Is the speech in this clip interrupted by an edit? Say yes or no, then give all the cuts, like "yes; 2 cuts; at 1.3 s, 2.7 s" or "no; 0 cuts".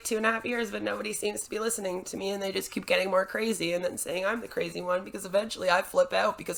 no; 0 cuts